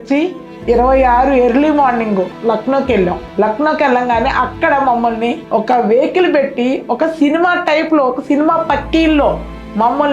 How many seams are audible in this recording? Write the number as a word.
three